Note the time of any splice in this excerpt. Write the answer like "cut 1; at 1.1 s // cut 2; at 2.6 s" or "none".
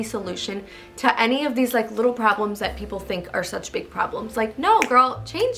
none